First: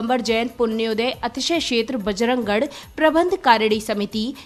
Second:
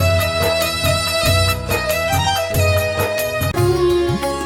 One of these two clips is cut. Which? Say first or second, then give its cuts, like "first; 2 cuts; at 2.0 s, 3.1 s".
second; 1 cut; at 3.5 s